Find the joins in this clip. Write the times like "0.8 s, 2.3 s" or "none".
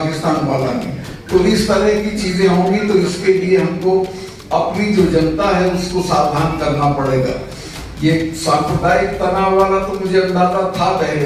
none